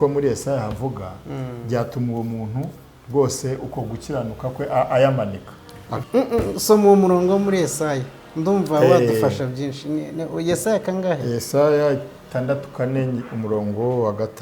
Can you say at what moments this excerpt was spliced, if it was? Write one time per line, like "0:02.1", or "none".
0:05.8